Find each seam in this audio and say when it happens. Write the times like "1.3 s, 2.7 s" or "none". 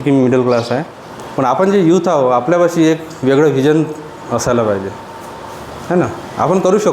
1.5 s